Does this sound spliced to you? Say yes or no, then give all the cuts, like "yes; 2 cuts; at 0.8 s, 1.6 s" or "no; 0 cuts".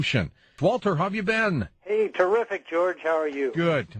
no; 0 cuts